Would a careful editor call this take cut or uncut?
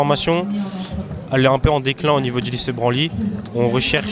uncut